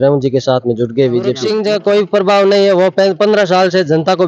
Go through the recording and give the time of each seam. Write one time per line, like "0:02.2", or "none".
0:01.4